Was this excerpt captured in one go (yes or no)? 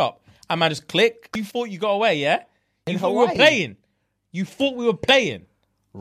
no